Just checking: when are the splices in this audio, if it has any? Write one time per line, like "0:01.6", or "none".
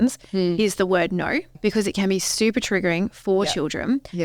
0:01.5